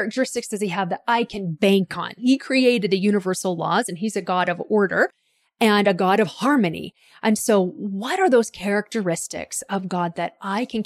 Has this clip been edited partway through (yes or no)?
yes